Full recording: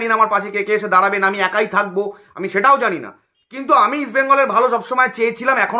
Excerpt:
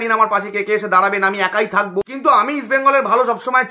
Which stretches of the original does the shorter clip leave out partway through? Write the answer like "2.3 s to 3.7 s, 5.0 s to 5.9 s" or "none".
2.1 s to 3.6 s